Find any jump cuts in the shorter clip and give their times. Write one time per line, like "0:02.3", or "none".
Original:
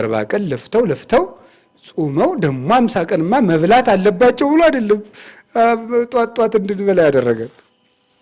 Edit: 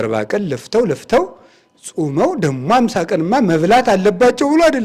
none